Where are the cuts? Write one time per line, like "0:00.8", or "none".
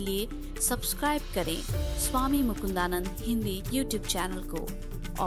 none